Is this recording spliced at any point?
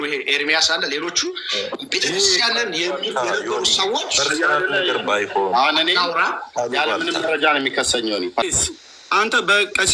yes; 1 cut; at 8.4 s

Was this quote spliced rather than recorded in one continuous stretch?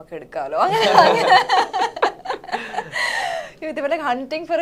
no; 0 cuts

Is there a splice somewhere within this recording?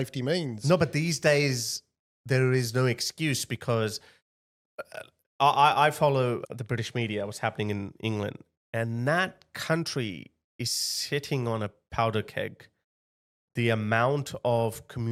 no; 0 cuts

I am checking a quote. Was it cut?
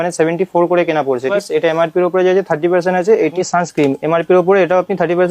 yes; 2 cuts; at 1.3 s, 3.4 s

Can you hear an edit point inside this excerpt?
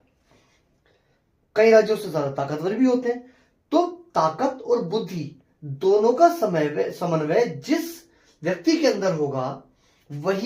no; 0 cuts

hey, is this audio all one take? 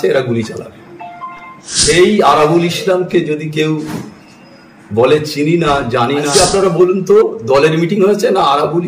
no; 2 cuts; at 2.0 s, 6.3 s

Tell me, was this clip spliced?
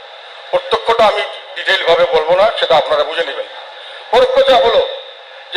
no; 0 cuts

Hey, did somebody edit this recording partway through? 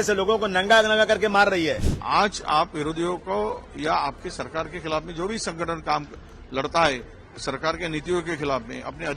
yes; 1 cut; at 1.9 s

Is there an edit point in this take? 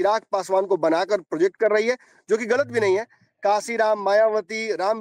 no; 0 cuts

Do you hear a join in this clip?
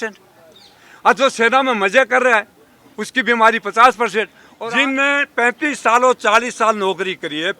yes; 1 cut; at 4.4 s

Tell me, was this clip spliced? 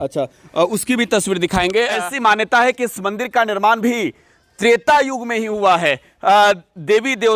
yes; 1 cut; at 1.9 s

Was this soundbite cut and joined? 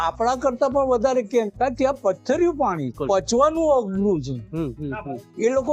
yes; 2 cuts; at 1.5 s, 3.0 s

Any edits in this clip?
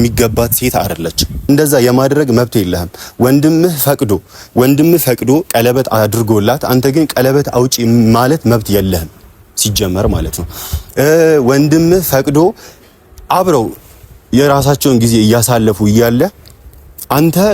yes; 1 cut; at 1.5 s

